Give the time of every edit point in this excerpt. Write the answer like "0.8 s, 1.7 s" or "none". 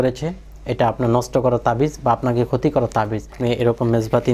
3.4 s